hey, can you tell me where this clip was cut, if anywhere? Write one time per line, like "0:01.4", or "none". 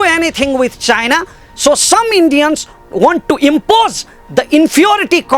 0:02.8